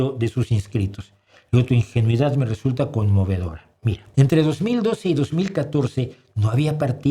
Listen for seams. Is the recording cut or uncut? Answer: cut